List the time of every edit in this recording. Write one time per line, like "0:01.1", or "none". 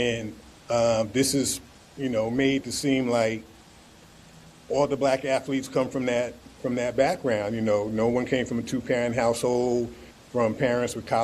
none